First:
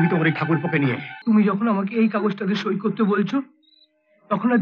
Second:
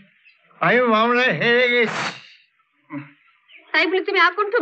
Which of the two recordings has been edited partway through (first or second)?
first